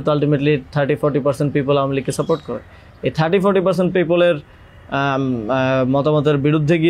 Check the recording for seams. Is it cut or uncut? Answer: uncut